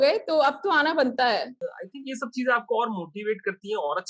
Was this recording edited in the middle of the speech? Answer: yes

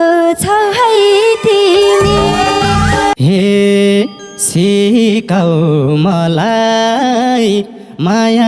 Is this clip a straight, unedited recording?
no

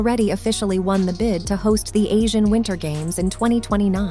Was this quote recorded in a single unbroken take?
yes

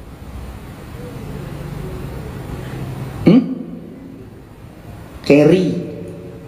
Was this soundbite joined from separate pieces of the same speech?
no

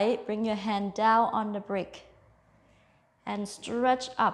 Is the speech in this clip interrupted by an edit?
no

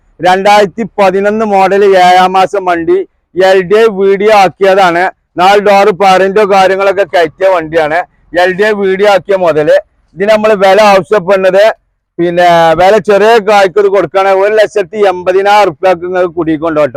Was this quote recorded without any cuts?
yes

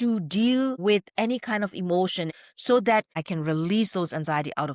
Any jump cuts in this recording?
yes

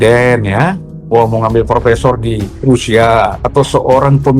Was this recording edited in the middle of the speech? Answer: yes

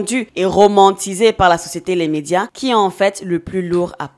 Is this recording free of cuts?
yes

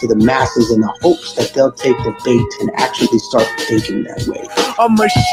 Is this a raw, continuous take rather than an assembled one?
yes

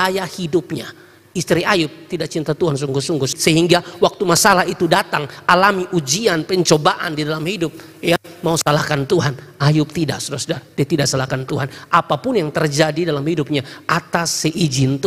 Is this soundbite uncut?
yes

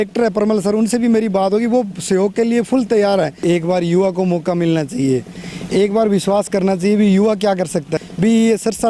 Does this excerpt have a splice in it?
yes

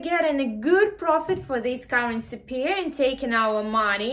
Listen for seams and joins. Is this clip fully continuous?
yes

